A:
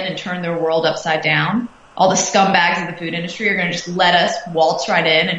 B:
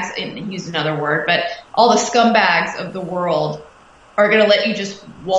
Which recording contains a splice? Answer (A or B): B